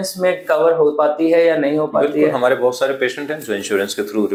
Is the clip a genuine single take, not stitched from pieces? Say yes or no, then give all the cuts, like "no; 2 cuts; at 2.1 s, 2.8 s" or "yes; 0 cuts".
yes; 0 cuts